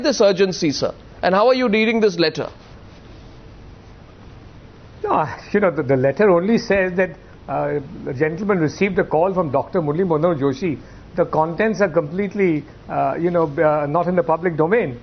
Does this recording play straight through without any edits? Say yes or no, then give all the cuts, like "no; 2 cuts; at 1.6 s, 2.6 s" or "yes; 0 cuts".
no; 1 cut; at 1.6 s